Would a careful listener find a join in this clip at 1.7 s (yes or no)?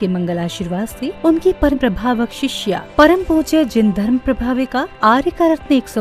yes